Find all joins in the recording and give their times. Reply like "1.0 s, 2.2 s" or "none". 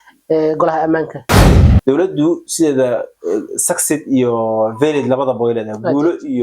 1.5 s